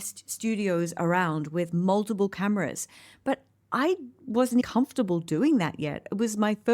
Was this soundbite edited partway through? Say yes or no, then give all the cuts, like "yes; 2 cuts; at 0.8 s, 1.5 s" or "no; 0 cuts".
yes; 1 cut; at 4.6 s